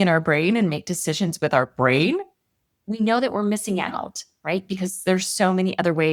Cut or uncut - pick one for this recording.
uncut